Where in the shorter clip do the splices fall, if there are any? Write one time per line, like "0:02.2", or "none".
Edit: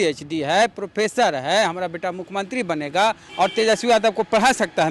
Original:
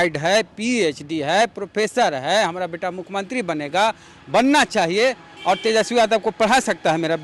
0:03.2